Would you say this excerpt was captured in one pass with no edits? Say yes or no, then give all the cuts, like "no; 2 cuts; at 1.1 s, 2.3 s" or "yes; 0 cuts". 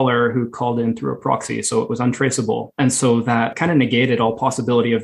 no; 2 cuts; at 2.7 s, 3.5 s